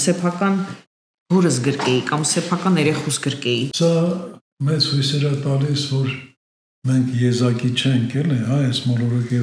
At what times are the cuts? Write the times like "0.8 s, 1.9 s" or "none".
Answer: 3.7 s